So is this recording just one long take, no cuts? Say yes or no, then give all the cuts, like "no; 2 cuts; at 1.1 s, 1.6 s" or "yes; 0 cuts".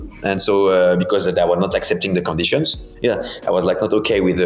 no; 1 cut; at 2.8 s